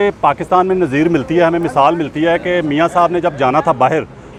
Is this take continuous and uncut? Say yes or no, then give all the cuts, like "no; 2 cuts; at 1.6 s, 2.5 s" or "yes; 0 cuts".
yes; 0 cuts